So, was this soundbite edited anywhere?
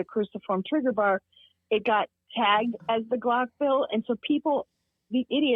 no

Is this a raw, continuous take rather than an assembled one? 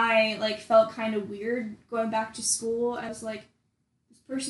no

